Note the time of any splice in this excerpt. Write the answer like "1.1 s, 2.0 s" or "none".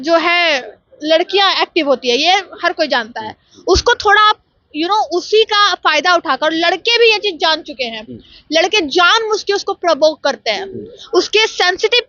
none